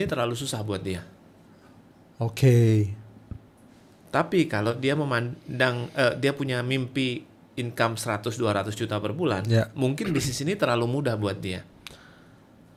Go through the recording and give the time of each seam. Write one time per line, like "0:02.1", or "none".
none